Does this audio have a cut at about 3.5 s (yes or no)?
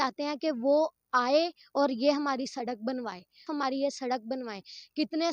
yes